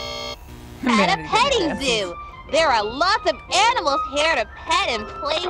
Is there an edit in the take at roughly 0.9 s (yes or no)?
yes